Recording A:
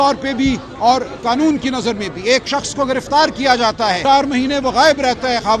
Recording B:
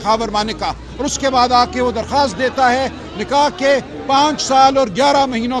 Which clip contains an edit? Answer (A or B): A